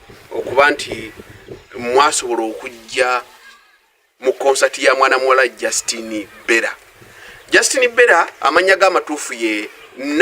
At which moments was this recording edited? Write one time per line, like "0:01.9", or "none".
0:08.4